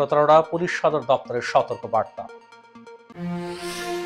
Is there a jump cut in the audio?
no; 0 cuts

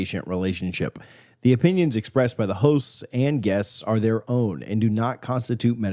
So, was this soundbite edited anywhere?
no; 0 cuts

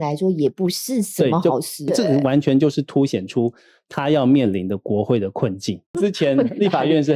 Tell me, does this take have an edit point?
yes; 2 cuts; at 1.9 s, 5.9 s

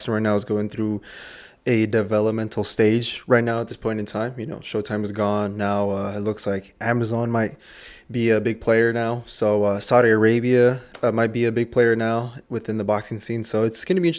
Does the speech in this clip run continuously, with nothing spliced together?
yes; 0 cuts

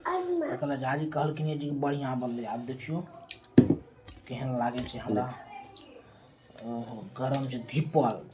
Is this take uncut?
yes; 0 cuts

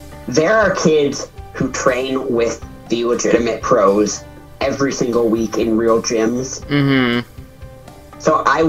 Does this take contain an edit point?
no; 0 cuts

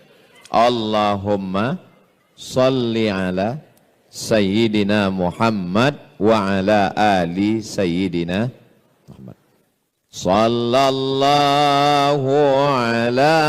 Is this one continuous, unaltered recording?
yes; 0 cuts

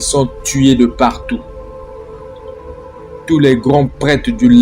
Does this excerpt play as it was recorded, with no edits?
no; 2 cuts; at 1.5 s, 3.0 s

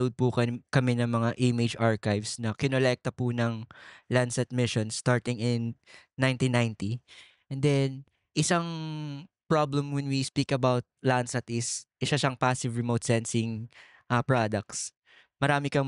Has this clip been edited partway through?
no; 0 cuts

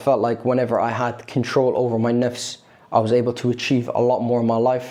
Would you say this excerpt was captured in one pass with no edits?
yes; 0 cuts

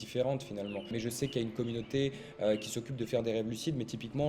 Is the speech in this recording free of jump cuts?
no; 1 cut; at 0.9 s

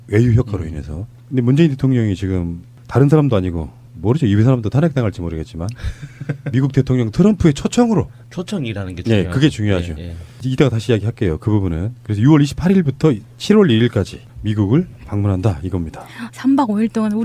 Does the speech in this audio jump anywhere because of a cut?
yes; 1 cut; at 15.0 s

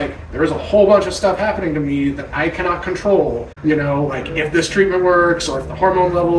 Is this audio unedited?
no; 1 cut; at 3.5 s

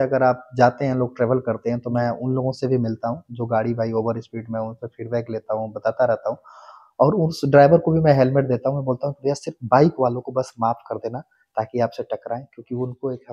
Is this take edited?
no; 0 cuts

